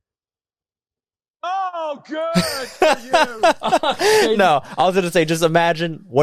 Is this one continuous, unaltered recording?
yes; 0 cuts

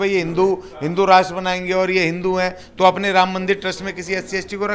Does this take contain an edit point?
no; 0 cuts

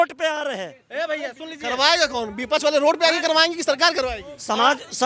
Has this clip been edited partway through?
no; 0 cuts

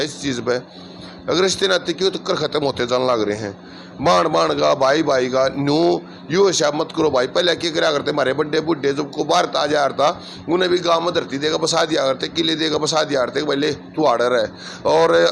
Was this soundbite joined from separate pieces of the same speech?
no; 0 cuts

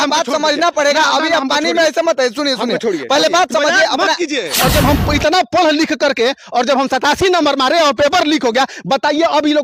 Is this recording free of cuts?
no; 1 cut; at 4.5 s

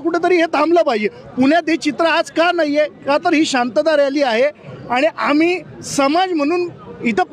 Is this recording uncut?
yes; 0 cuts

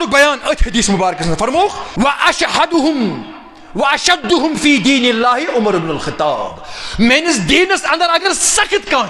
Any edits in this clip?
yes; 1 cut; at 1.8 s

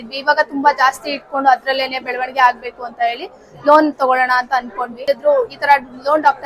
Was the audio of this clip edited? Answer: yes; 1 cut; at 5.0 s

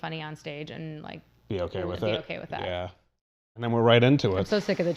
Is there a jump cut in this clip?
yes; 1 cut; at 3.5 s

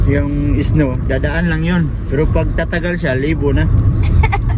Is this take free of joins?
yes; 0 cuts

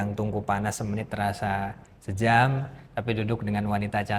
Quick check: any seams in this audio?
no; 0 cuts

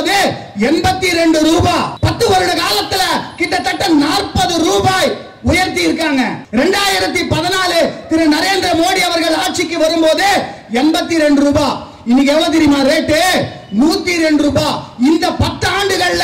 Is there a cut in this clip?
no; 0 cuts

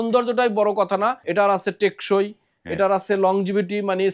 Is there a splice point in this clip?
yes; 1 cut; at 1.2 s

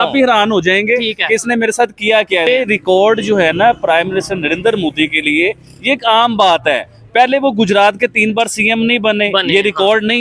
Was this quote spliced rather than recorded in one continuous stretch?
yes; 1 cut; at 2.5 s

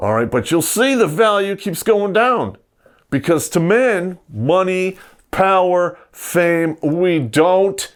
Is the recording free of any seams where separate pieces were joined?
yes; 0 cuts

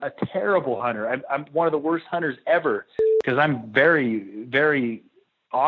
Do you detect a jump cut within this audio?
yes; 1 cut; at 3.0 s

